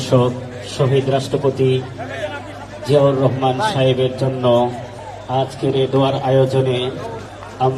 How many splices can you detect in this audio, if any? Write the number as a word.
zero